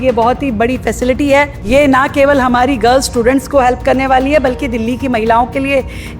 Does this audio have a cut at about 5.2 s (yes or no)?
no